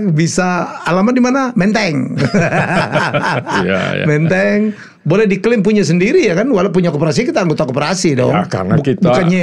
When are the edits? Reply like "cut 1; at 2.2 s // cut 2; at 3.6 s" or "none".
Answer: none